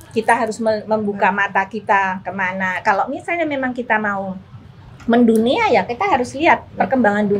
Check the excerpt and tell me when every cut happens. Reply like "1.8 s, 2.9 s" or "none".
none